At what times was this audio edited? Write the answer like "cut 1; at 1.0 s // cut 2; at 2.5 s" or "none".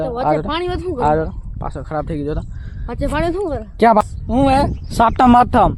cut 1; at 4.0 s